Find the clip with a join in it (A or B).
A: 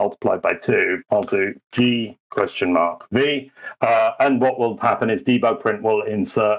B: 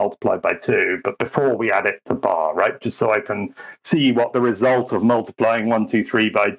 A